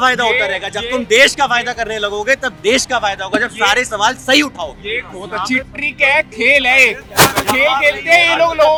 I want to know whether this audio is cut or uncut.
uncut